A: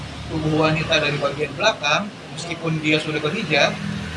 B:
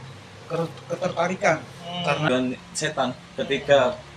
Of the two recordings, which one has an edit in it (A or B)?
B